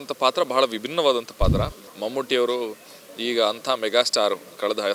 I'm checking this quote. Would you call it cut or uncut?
cut